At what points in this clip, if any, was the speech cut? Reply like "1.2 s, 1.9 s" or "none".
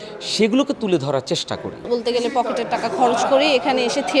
1.9 s